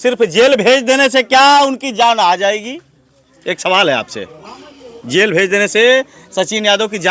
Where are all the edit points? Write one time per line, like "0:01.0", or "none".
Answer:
none